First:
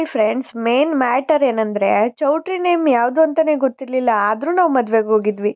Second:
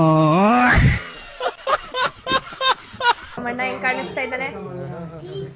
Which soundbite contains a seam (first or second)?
second